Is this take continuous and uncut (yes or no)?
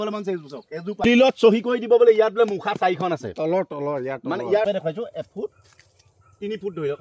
no